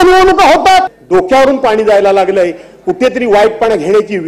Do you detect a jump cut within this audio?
yes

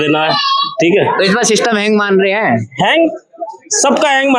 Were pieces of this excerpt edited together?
no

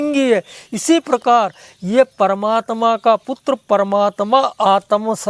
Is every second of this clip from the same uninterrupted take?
yes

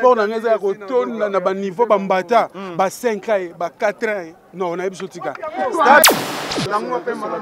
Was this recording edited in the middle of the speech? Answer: yes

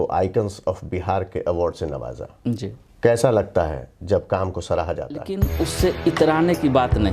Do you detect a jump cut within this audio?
yes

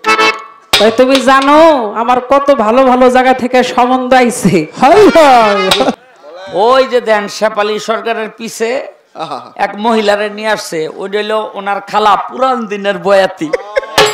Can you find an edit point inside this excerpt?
yes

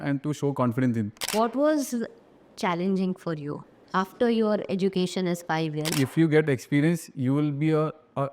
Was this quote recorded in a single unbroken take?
no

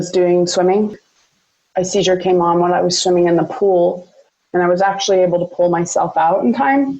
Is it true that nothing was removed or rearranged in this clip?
no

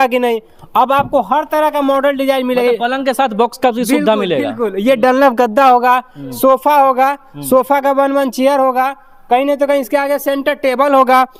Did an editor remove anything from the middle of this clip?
no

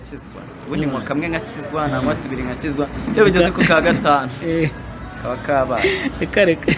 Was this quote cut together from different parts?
no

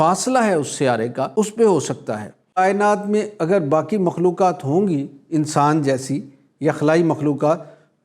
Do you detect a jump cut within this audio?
yes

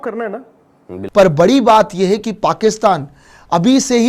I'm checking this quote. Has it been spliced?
yes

